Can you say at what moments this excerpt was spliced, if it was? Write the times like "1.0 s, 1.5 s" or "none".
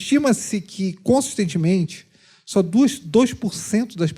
none